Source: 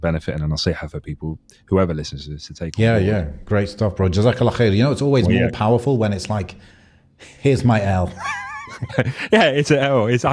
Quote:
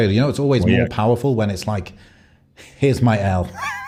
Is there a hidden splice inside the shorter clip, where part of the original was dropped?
no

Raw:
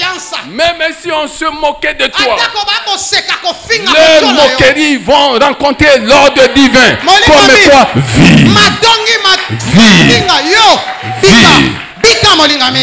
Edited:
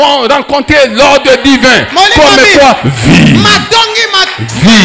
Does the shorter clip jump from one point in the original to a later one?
no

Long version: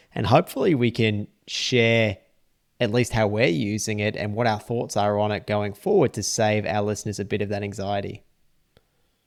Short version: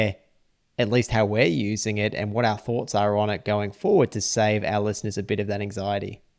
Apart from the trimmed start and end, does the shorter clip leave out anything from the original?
no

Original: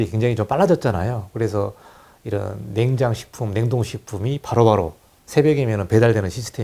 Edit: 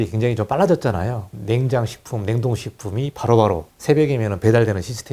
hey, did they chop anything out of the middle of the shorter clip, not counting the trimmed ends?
yes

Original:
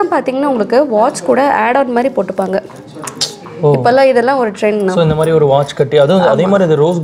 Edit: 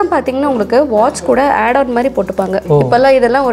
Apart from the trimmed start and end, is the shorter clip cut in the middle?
yes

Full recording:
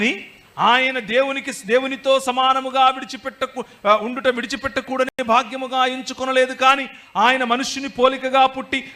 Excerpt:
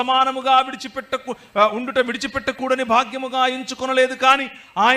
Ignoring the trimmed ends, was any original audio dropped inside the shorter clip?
yes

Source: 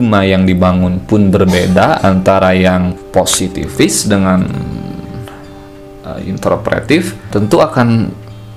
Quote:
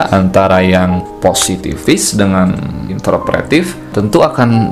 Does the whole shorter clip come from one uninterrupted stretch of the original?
no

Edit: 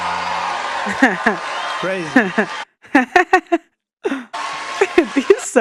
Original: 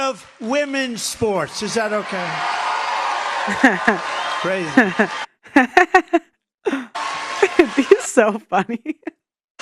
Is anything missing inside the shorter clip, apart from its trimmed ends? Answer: no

